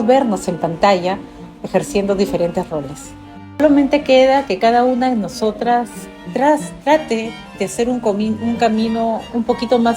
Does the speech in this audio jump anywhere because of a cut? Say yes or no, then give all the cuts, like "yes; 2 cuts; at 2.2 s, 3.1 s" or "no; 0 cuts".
yes; 1 cut; at 3.6 s